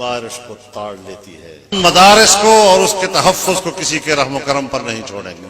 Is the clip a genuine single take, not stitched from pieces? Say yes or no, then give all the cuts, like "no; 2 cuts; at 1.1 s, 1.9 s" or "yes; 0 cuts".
no; 1 cut; at 1.7 s